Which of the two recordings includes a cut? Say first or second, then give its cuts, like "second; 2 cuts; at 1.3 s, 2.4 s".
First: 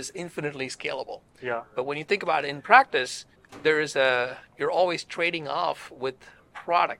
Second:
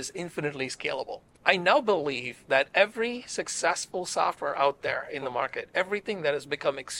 second; 1 cut; at 1.3 s